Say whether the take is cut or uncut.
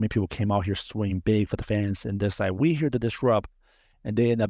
uncut